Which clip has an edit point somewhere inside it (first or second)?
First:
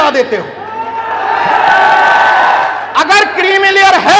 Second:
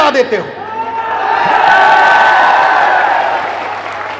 first